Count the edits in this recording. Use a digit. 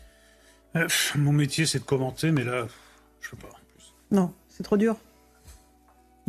0